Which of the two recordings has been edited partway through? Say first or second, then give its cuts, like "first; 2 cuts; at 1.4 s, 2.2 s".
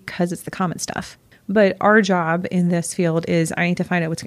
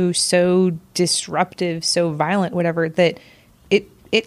first; 1 cut; at 1.3 s